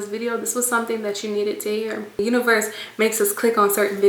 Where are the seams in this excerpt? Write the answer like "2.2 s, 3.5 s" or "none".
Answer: 2.2 s